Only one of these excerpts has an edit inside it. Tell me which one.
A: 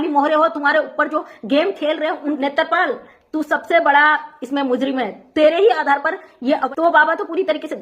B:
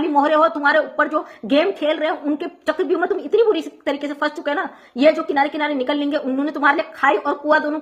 A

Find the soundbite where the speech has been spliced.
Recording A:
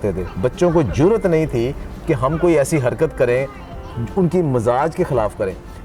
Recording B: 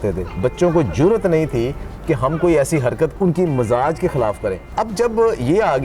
B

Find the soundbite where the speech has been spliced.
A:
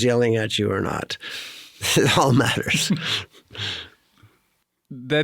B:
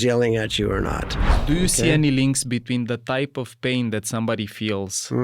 B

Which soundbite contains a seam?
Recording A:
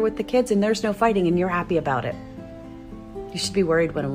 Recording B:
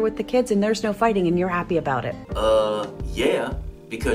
A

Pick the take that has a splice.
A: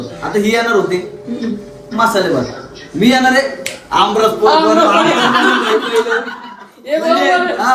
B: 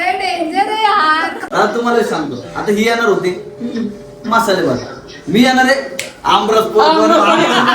B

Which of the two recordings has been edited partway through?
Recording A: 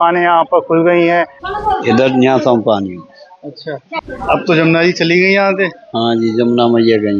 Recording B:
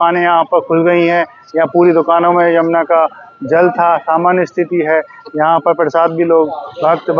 A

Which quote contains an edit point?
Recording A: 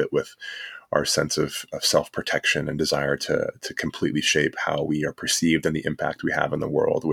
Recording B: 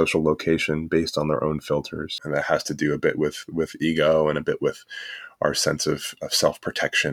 B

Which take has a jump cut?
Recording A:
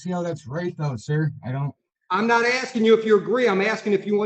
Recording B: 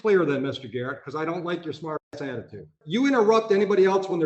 B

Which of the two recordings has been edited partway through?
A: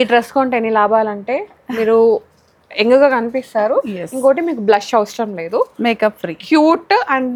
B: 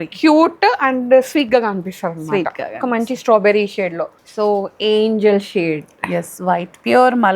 B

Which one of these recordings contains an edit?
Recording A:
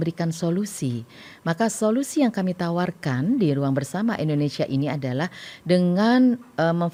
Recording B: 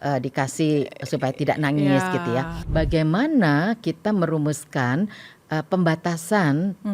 B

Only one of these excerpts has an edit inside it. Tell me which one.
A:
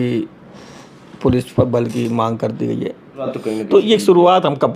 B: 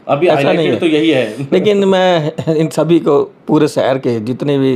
A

